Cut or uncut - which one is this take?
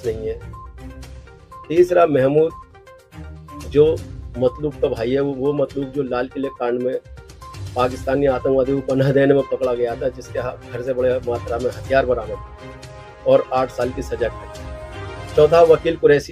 uncut